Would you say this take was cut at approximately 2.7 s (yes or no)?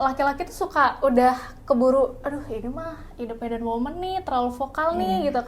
no